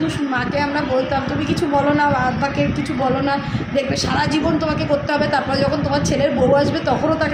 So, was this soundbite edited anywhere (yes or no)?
no